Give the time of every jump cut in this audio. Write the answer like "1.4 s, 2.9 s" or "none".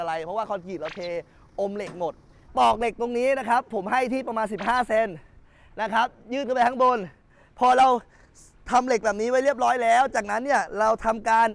2.5 s